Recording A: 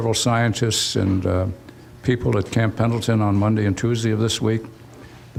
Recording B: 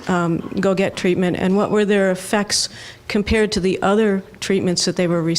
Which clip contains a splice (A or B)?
B